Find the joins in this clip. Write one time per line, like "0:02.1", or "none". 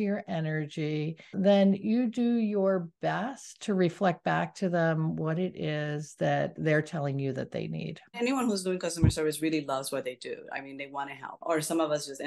0:01.3
0:08.2
0:11.4